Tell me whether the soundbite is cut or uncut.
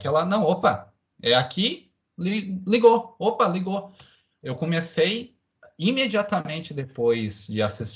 uncut